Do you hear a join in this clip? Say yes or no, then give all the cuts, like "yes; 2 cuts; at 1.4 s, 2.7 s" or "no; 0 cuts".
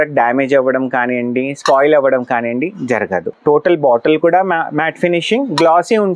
yes; 1 cut; at 3.3 s